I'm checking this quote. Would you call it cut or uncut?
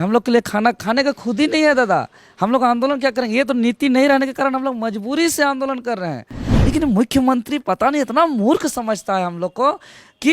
cut